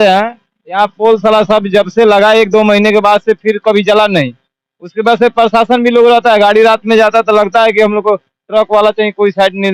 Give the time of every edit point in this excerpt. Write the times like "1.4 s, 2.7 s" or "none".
none